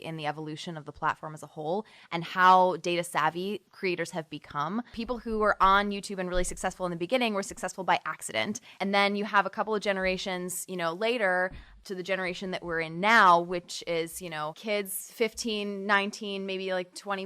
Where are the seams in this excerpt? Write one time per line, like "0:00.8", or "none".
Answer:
0:03.6
0:05.0
0:08.8
0:11.8
0:14.6